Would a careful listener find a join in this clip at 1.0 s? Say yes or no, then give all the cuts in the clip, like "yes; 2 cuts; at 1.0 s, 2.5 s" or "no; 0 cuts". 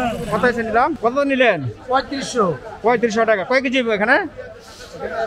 yes; 1 cut; at 1.0 s